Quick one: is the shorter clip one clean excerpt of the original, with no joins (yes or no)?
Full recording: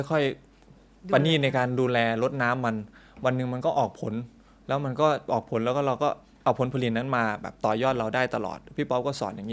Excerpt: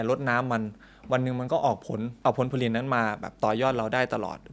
no